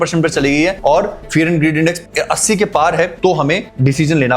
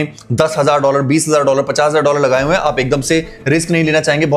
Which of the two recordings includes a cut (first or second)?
first